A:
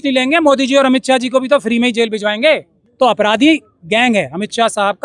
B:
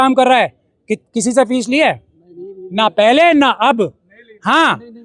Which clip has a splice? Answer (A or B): A